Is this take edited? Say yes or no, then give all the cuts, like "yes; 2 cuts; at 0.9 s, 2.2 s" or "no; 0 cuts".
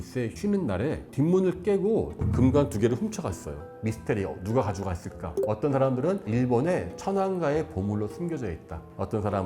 yes; 2 cuts; at 2.2 s, 3.6 s